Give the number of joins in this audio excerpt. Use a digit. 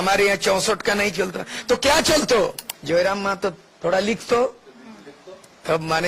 1